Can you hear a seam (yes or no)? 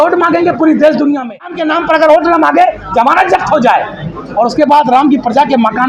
yes